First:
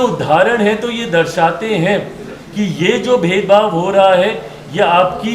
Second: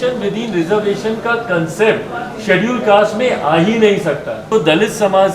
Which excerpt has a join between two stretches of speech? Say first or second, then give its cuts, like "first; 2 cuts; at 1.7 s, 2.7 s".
second; 1 cut; at 4.4 s